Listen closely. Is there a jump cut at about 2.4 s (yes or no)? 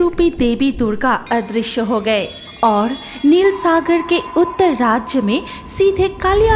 yes